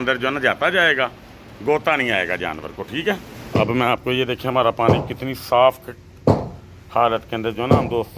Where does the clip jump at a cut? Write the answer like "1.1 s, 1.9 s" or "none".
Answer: 3.3 s